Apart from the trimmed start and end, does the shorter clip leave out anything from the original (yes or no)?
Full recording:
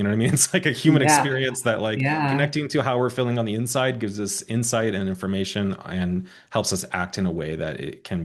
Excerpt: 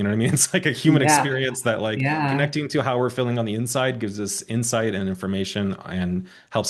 no